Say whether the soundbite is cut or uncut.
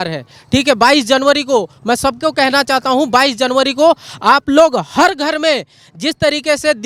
uncut